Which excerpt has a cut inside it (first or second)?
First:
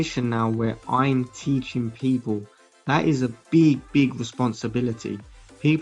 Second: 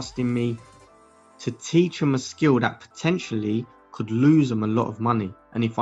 first